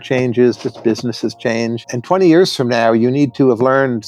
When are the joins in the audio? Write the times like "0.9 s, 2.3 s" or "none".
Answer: none